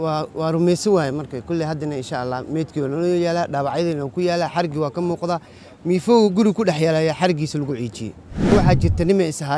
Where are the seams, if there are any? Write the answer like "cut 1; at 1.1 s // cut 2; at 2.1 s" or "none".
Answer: cut 1; at 8.5 s